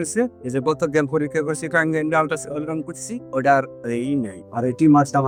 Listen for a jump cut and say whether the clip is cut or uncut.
uncut